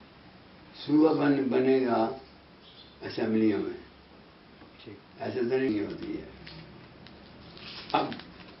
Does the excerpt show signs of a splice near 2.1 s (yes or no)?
no